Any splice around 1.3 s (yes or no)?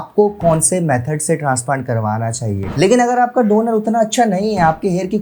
no